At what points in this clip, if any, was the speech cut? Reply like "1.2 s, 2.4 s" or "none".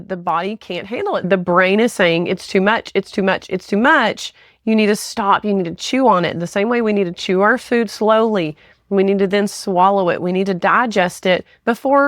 1.3 s